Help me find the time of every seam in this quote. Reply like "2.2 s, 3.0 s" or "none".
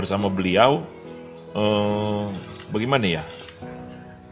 none